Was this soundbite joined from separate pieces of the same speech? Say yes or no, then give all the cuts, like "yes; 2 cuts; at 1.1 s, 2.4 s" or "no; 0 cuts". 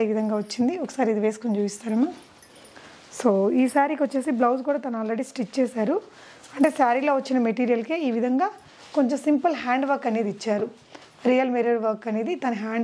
no; 0 cuts